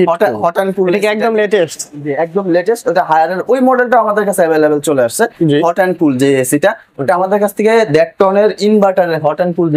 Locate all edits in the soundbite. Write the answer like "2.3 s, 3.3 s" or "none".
none